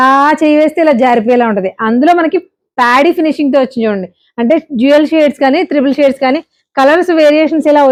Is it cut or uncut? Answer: uncut